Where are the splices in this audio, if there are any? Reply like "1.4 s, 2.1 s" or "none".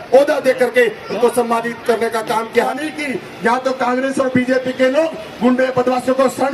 2.7 s